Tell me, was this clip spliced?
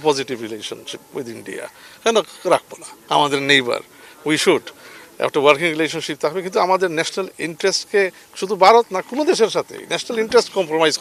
no; 0 cuts

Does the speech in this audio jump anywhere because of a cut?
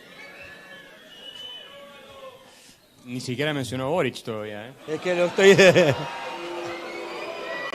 no; 0 cuts

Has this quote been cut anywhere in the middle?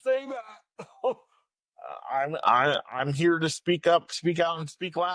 no; 0 cuts

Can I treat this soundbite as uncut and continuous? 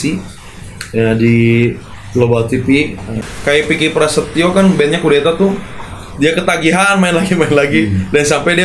no; 1 cut; at 3.2 s

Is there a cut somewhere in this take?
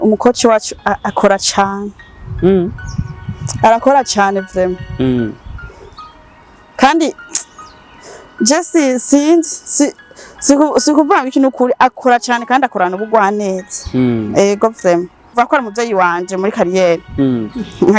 yes; 1 cut; at 15.3 s

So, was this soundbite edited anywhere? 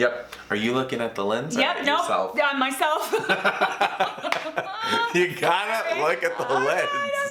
no; 0 cuts

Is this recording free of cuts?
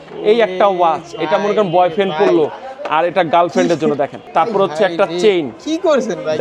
no; 1 cut; at 4.2 s

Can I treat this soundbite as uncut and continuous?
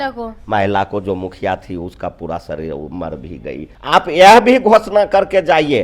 no; 1 cut; at 3.7 s

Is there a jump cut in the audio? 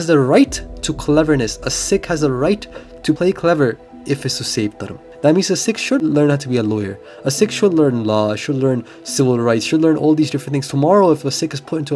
yes; 4 cuts; at 3.2 s, 4.0 s, 5.0 s, 6.0 s

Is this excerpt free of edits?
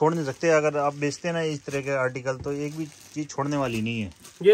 yes; 0 cuts

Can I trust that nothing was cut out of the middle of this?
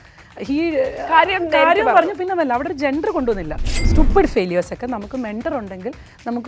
no; 1 cut; at 3.8 s

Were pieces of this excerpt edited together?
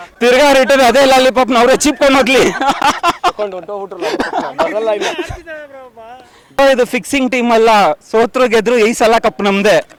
no; 0 cuts

